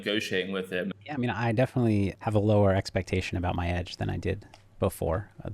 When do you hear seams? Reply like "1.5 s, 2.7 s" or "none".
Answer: 0.9 s, 2.2 s

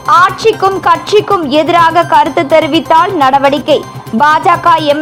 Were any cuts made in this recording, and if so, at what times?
none

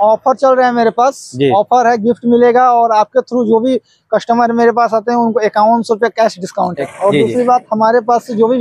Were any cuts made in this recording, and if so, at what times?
6.8 s

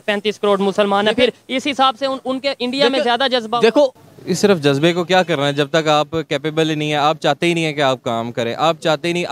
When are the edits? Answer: 4.0 s

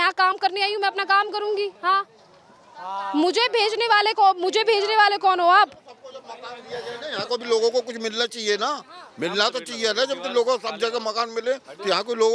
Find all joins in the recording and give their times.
none

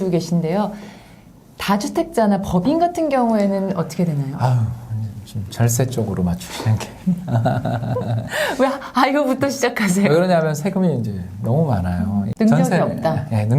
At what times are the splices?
12.3 s

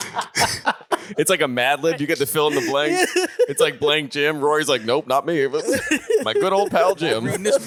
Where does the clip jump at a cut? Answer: none

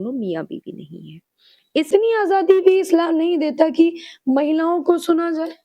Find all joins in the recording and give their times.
1.9 s

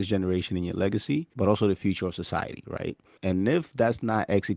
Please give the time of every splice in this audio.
1.3 s, 3.1 s

